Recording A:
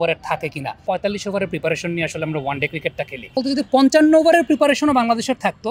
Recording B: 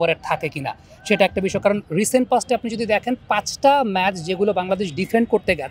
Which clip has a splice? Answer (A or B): A